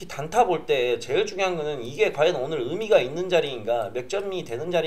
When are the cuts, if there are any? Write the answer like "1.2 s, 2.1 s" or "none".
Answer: none

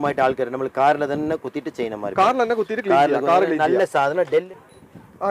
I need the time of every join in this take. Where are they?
4.3 s

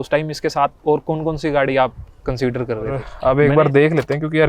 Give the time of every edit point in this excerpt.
3.1 s

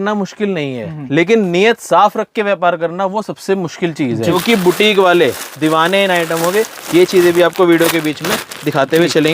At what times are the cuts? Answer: 4.3 s

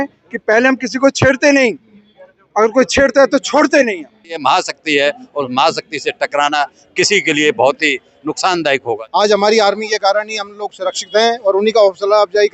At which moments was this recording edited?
4.4 s, 9.0 s

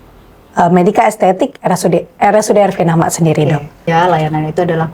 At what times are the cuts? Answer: 3.9 s

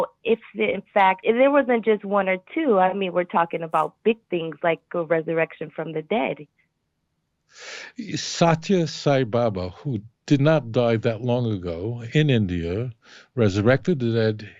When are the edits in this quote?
1.2 s

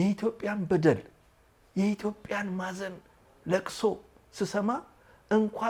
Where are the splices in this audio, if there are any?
none

